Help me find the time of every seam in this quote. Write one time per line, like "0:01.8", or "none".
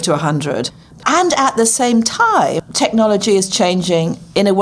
0:01.0
0:02.6